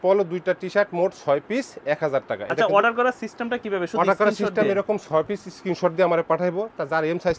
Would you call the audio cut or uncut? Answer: uncut